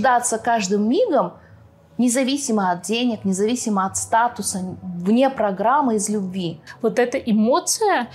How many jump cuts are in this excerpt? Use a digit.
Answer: 1